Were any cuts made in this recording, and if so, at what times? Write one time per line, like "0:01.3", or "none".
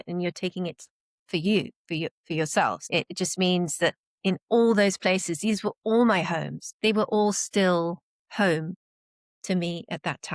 0:02.8
0:06.6